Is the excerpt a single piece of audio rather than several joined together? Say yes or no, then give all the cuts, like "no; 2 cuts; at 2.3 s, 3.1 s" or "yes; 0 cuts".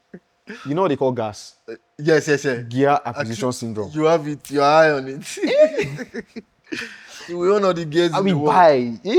yes; 0 cuts